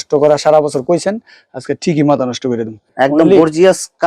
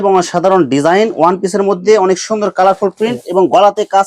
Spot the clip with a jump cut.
first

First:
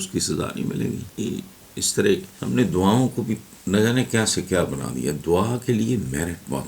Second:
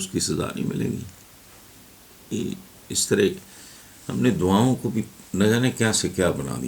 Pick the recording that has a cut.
first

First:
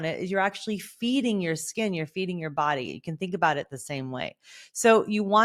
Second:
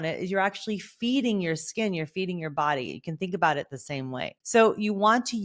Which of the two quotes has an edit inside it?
second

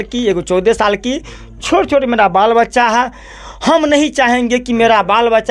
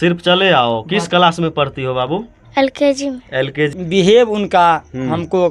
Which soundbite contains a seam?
second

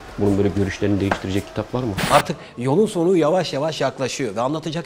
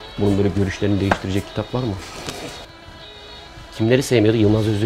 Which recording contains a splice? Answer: first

